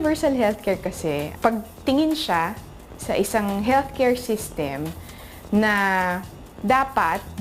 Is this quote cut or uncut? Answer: cut